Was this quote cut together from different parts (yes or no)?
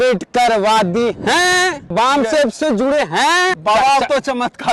yes